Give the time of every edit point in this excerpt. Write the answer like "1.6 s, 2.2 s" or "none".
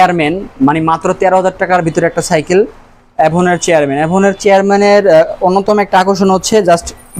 none